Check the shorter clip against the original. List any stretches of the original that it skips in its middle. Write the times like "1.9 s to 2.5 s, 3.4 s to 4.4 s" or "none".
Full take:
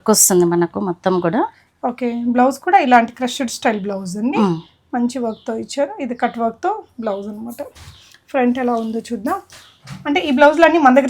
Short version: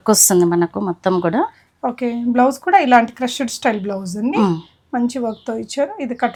none